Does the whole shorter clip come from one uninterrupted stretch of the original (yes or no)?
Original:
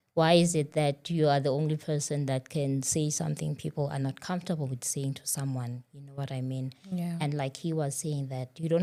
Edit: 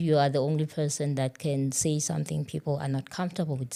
yes